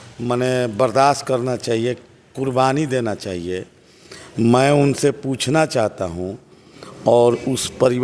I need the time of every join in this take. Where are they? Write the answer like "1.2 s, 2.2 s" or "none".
none

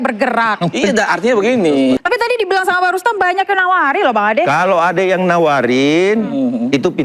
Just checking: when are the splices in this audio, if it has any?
2.0 s

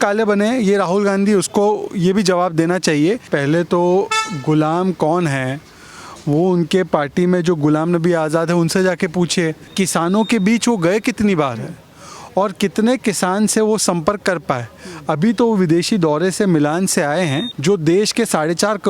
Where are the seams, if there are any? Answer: 3.3 s, 9.7 s, 17.5 s

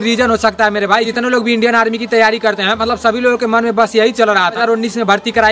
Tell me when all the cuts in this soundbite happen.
1.1 s, 4.6 s

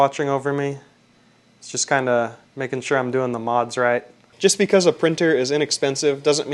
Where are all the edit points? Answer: 4.2 s

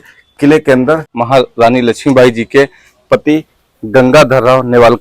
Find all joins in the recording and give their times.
1.1 s

